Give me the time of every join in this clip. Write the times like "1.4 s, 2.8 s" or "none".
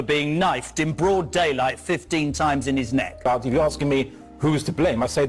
3.2 s